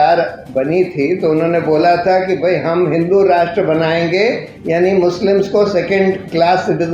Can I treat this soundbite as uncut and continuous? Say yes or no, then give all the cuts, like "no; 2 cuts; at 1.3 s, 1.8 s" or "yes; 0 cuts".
yes; 0 cuts